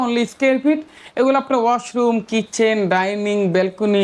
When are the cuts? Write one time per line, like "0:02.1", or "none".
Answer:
none